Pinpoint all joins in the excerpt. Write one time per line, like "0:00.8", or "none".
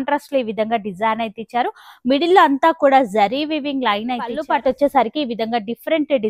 0:04.4